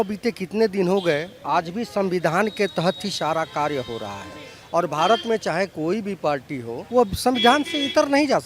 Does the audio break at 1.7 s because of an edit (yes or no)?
no